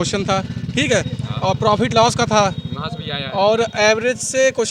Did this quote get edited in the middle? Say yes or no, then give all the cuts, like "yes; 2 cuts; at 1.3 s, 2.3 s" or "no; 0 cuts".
no; 0 cuts